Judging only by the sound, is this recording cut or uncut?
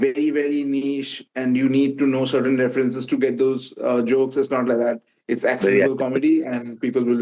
uncut